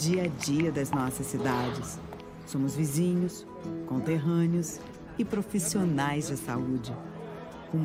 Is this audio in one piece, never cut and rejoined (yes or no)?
yes